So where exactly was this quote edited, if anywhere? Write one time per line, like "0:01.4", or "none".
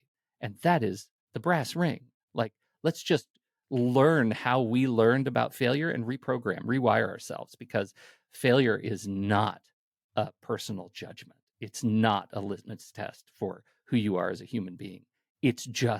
none